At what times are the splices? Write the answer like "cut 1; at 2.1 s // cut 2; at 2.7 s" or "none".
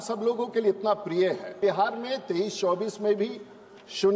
cut 1; at 1.5 s